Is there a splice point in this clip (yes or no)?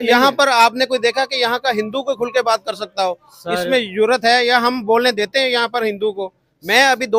no